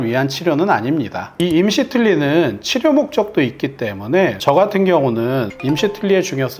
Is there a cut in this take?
yes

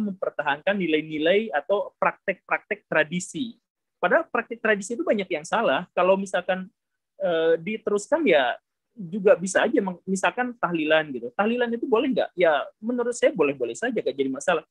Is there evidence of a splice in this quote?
no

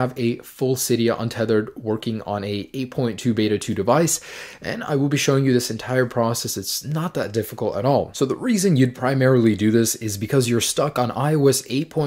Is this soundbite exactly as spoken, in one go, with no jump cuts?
yes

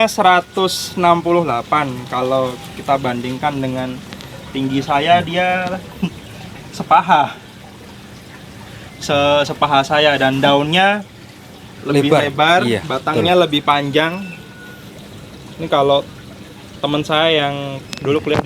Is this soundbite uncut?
yes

